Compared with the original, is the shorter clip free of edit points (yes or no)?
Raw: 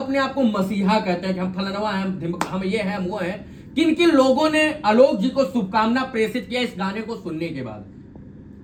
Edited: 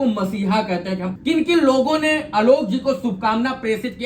no